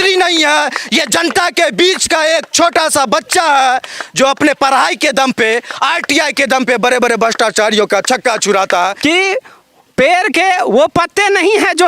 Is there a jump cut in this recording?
yes; 1 cut; at 8.9 s

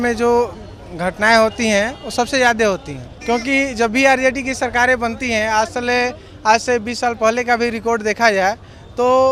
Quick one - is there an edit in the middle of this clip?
no; 0 cuts

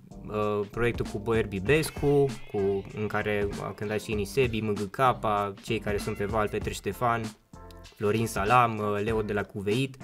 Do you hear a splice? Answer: no; 0 cuts

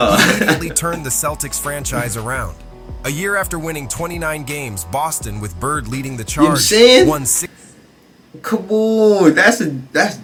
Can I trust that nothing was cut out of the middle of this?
yes; 0 cuts

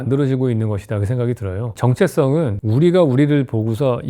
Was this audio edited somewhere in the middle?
no; 0 cuts

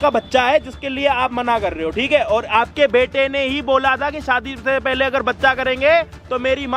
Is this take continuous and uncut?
yes; 0 cuts

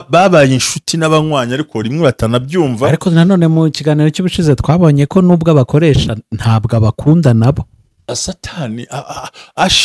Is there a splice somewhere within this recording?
yes; 1 cut; at 8.1 s

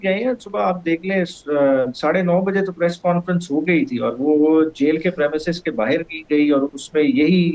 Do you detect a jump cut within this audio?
no; 0 cuts

